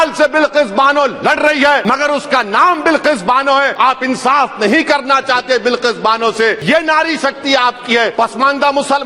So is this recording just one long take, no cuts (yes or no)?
no